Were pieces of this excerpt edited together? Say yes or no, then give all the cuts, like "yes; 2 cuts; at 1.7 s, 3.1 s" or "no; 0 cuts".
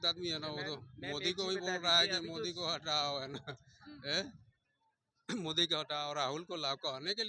no; 0 cuts